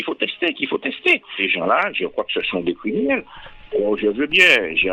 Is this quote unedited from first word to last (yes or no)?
no